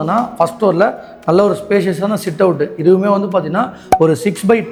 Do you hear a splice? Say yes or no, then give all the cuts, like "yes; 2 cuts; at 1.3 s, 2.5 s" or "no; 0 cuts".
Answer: no; 0 cuts